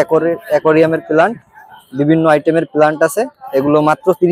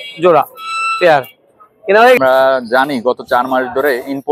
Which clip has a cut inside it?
second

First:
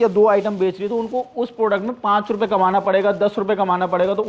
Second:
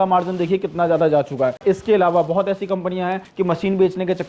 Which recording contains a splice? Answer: second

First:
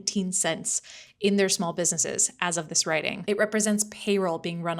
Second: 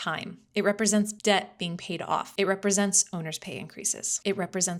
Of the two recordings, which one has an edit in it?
first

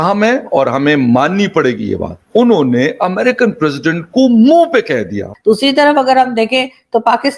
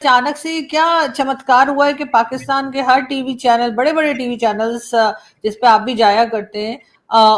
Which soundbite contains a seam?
first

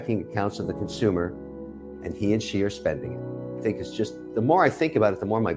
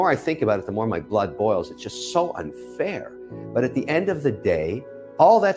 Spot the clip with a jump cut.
first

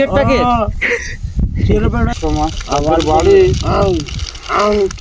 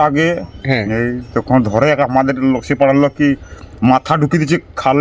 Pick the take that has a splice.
first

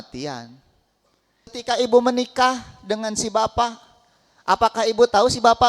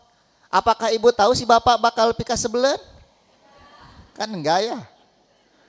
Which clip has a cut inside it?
first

